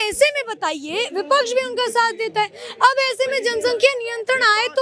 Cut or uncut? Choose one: uncut